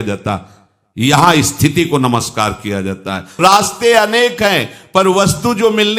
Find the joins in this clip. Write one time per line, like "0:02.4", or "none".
0:03.4